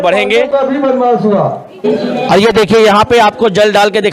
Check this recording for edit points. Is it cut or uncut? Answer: cut